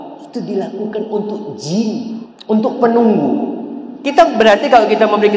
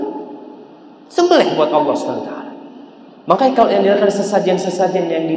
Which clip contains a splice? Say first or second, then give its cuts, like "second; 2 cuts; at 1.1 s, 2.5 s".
first; 1 cut; at 2.3 s